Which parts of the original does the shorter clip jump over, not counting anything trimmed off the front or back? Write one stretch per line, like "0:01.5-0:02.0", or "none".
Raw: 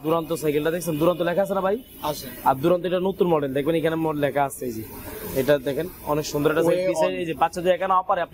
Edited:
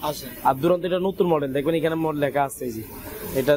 none

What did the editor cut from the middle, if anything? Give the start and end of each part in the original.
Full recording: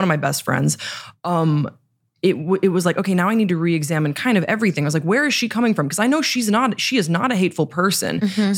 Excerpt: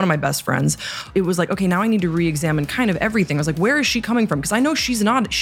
0:01.1-0:02.6

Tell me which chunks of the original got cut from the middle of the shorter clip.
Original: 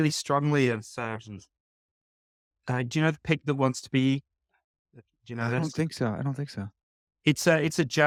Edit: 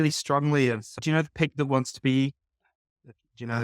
0:01.0-0:02.9

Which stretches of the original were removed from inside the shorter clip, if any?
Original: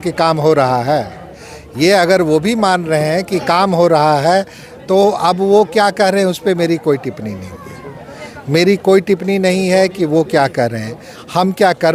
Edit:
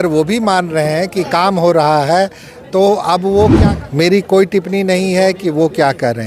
0:05.7-0:08.1

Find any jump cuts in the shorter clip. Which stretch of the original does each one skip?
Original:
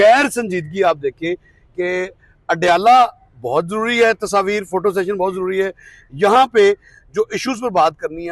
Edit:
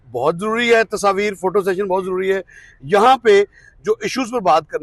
none

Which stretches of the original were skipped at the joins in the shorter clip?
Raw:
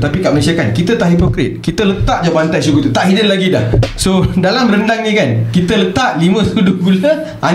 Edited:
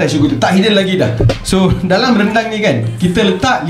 none

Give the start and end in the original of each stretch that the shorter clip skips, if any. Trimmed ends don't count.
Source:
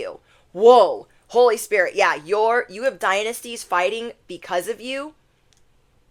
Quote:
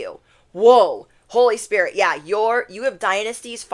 none

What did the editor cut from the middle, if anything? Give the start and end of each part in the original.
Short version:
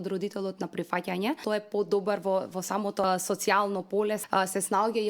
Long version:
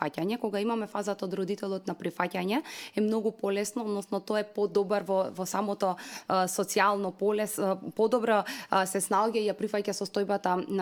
0:02.7-0:04.2
0:05.9-0:06.3
0:07.5-0:08.6

